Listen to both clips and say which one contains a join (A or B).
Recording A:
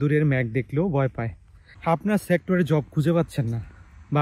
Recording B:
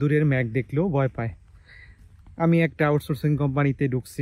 A